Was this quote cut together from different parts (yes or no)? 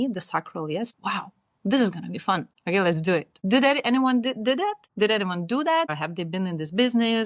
yes